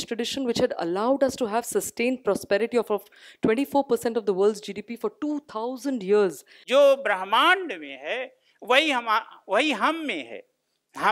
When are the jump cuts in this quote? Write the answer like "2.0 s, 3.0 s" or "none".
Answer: 6.5 s